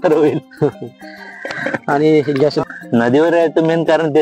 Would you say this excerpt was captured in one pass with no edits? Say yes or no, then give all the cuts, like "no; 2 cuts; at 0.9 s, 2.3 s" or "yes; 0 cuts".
no; 1 cut; at 2.6 s